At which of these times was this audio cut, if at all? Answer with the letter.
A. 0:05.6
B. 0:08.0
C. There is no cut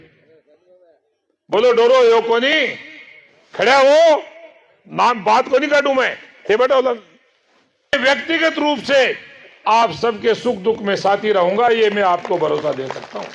B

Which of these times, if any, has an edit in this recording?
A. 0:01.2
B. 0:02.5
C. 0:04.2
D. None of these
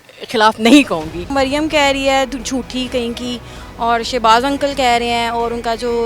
A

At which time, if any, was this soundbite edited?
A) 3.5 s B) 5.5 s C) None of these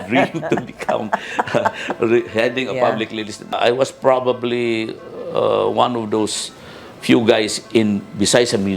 A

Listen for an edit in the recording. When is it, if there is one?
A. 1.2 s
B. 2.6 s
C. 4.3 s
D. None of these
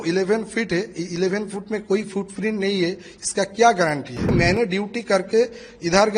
C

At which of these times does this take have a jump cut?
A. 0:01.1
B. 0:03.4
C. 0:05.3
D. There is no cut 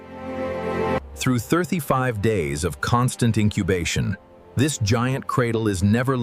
A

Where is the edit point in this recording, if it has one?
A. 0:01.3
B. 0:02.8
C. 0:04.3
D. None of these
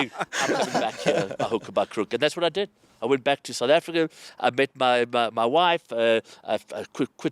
D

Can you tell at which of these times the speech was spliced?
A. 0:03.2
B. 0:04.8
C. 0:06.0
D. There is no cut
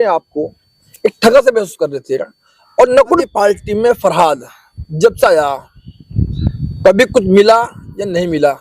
A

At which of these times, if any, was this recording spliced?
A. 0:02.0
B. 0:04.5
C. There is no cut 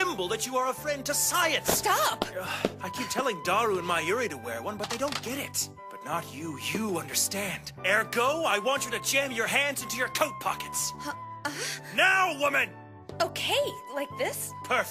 B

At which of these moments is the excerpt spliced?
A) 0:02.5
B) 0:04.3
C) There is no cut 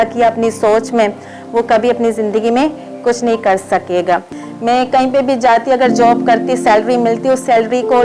B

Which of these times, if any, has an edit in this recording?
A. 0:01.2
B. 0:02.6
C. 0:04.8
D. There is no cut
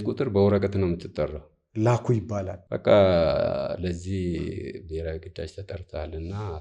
B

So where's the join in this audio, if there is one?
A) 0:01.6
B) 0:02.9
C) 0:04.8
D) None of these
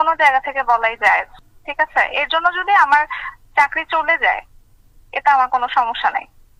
D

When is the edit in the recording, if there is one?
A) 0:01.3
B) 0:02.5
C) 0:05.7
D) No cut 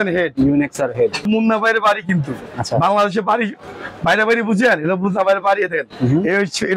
A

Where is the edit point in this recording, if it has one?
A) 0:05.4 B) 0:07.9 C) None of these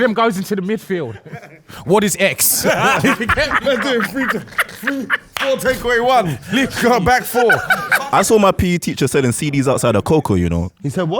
B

